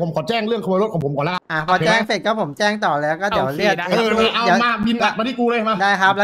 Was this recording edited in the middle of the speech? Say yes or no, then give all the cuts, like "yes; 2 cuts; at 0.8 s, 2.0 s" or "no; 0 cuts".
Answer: yes; 1 cut; at 1.5 s